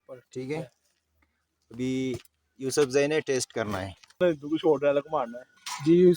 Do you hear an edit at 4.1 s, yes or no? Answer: yes